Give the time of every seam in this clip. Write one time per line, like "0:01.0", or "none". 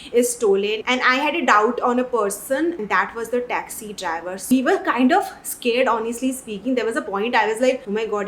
0:02.8
0:04.5